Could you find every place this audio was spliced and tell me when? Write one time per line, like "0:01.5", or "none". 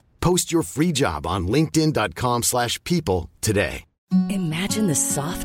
0:03.9